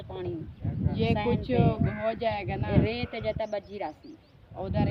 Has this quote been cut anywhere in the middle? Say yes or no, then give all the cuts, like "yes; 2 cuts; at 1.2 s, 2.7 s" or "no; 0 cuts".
no; 0 cuts